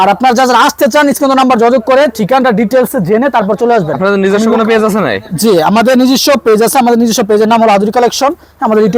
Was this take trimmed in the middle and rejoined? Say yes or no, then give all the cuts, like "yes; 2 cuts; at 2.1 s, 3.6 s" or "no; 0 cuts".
no; 0 cuts